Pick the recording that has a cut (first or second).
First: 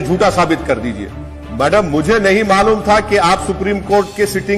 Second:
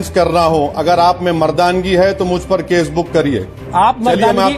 first